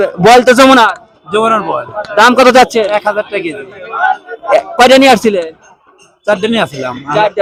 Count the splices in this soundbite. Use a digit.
0